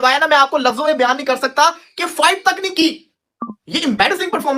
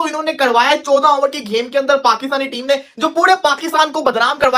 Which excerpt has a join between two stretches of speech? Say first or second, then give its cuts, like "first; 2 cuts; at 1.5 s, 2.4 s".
first; 1 cut; at 3.2 s